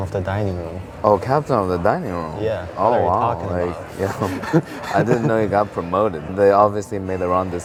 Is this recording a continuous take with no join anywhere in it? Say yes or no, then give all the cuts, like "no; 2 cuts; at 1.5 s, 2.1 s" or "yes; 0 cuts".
yes; 0 cuts